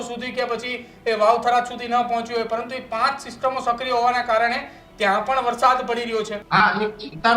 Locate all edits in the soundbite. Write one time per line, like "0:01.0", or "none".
0:06.4